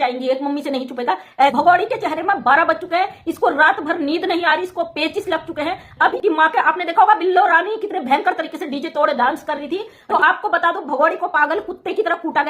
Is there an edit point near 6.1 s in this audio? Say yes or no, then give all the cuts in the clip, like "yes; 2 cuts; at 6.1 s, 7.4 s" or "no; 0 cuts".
yes; 3 cuts; at 1.5 s, 6.1 s, 9.9 s